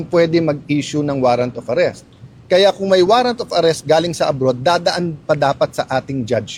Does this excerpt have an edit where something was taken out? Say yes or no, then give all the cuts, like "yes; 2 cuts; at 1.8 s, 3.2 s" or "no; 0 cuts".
no; 0 cuts